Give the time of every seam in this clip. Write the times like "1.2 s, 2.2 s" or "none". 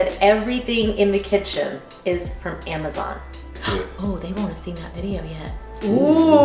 3.6 s